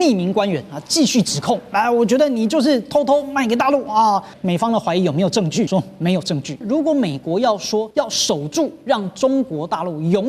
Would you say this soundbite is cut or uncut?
cut